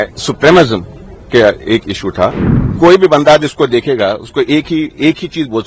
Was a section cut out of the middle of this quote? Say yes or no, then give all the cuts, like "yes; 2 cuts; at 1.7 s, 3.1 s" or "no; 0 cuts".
yes; 1 cut; at 2.3 s